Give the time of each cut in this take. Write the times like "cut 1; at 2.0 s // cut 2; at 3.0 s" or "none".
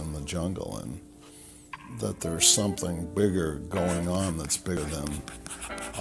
cut 1; at 4.8 s